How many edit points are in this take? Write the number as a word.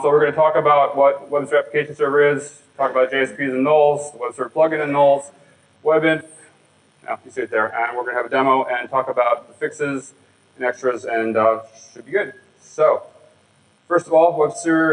one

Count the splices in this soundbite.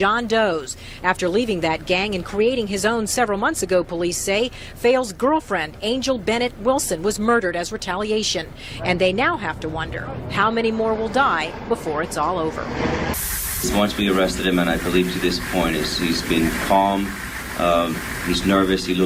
zero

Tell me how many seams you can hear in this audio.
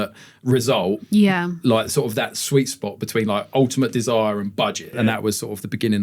one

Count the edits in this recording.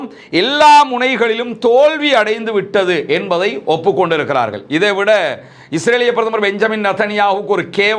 zero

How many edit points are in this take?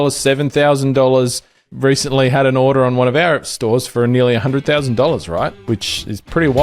two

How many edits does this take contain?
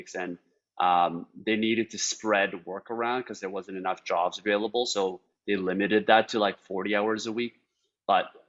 zero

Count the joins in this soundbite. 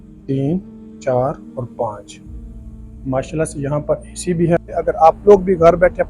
one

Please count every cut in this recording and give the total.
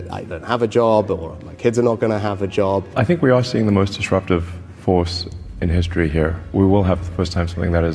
two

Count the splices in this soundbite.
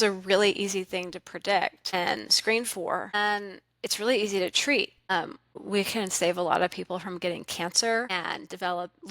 one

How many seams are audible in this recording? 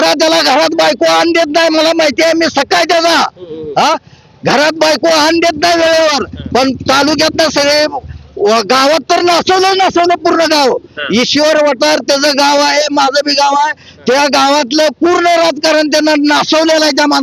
zero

